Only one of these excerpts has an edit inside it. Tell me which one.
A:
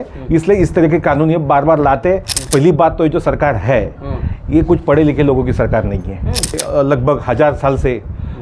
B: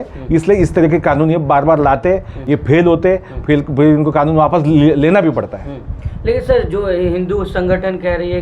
A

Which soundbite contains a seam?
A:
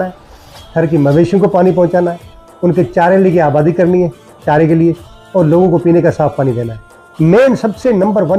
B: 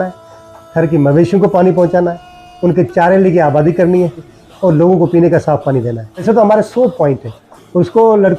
B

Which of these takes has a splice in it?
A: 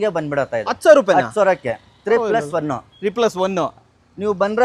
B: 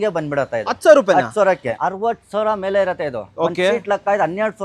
B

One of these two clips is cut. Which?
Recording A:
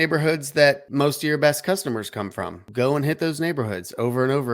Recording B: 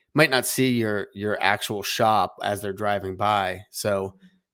A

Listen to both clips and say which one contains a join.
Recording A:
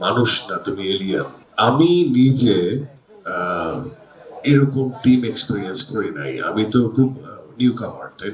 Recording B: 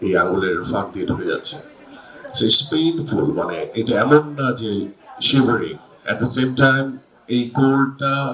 A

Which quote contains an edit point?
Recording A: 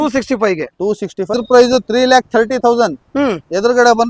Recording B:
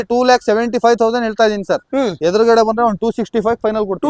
A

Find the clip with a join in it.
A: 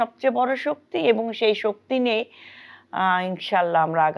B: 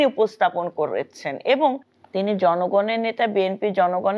B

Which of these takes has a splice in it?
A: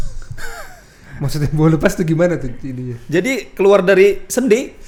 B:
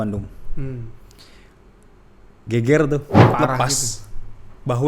B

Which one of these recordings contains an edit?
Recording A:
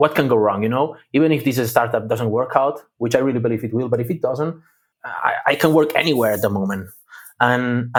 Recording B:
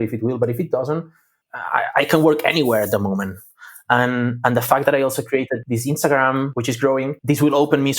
B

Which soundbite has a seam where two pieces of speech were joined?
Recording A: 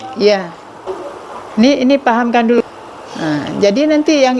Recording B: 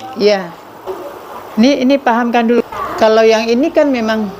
A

